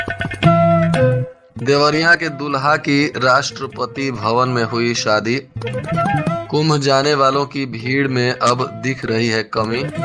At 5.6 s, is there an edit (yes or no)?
no